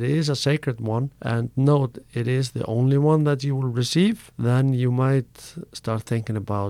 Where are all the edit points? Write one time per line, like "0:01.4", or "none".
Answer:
0:01.2
0:04.3

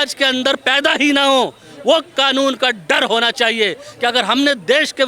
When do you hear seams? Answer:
none

